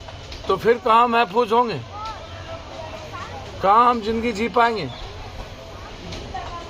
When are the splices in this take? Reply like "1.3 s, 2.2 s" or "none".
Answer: none